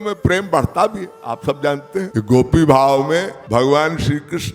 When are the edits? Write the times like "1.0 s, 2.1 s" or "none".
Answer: 2.1 s, 3.4 s

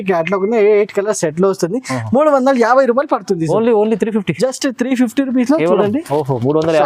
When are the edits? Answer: none

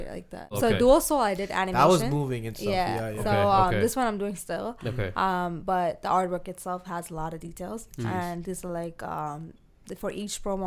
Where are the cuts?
none

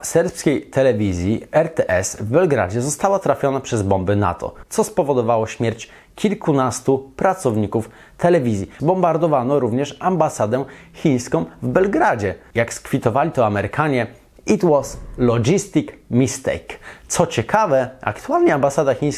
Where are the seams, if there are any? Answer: 8.7 s, 12.4 s

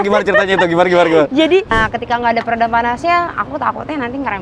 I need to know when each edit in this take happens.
1.7 s

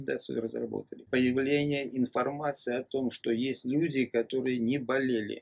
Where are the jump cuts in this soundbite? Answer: 1.0 s

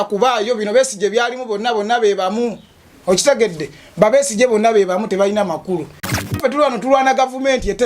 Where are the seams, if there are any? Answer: 6.4 s

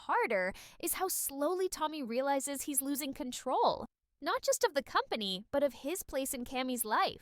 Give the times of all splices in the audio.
1.5 s

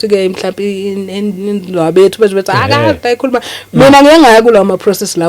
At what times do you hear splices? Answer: none

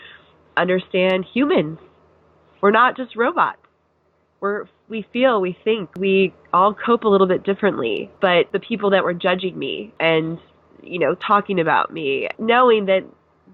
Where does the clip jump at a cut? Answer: 5.9 s, 8.4 s, 9.9 s, 12.3 s

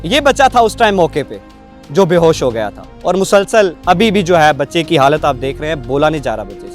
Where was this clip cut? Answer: 3.8 s

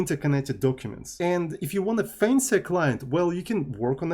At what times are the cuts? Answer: 1.2 s

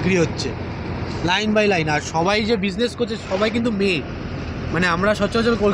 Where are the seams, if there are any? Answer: none

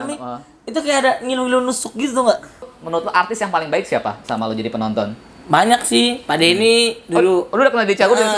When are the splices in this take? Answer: 2.8 s

